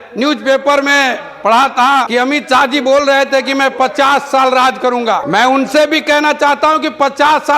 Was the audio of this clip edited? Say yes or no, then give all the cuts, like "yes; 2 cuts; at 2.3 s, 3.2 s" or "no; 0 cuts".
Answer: yes; 2 cuts; at 2.1 s, 5.2 s